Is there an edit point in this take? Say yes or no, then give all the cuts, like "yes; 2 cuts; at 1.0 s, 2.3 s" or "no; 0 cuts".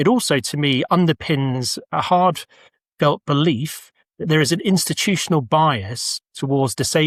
no; 0 cuts